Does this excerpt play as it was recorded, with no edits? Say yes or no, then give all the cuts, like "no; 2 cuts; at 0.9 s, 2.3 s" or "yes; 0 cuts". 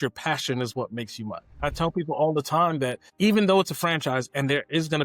no; 2 cuts; at 1.7 s, 3.0 s